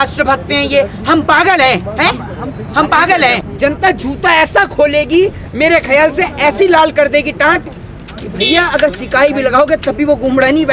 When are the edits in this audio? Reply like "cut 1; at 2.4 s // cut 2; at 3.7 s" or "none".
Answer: cut 1; at 3.4 s